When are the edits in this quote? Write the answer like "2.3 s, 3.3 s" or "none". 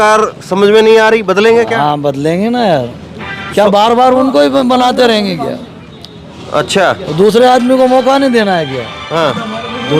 none